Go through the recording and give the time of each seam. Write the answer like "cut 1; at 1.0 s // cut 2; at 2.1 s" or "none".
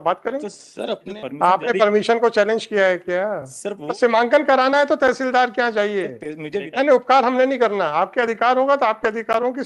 cut 1; at 1.1 s // cut 2; at 3.8 s // cut 3; at 6.7 s